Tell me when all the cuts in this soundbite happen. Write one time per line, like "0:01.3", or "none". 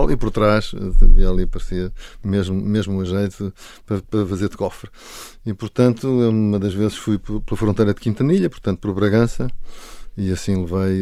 none